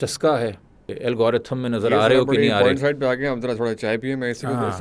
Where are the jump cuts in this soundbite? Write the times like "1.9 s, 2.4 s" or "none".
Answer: 0.9 s